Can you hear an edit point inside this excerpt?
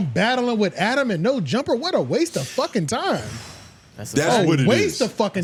no; 0 cuts

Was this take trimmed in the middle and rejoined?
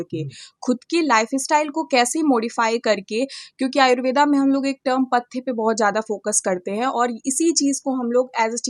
no; 0 cuts

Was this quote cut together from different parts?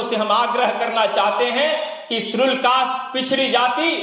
no; 0 cuts

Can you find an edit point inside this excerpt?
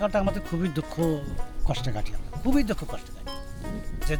no; 0 cuts

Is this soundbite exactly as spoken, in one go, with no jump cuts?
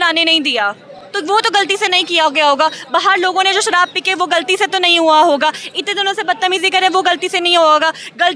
yes; 0 cuts

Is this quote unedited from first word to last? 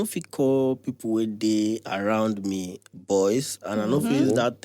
yes; 0 cuts

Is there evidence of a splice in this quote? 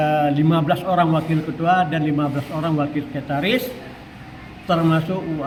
no; 0 cuts

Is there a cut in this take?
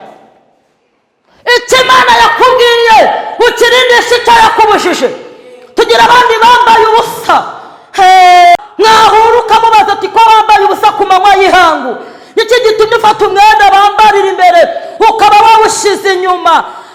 no; 0 cuts

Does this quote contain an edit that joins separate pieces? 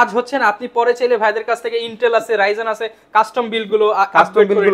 no; 0 cuts

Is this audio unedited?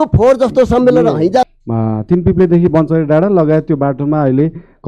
no; 1 cut; at 1.5 s

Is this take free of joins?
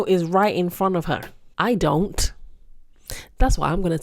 no; 1 cut; at 1.4 s

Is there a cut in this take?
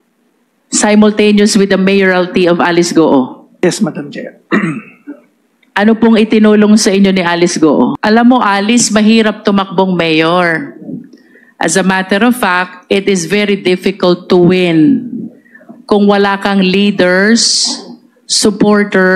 yes; 1 cut; at 8.0 s

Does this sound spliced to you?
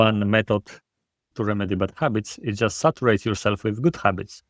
no; 0 cuts

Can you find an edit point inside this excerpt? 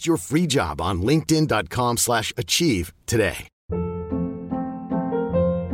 yes; 1 cut; at 3.5 s

